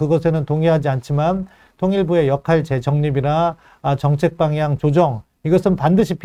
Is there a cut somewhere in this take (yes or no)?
no